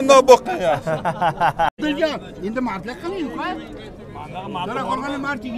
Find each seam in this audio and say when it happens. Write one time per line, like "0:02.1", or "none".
0:01.7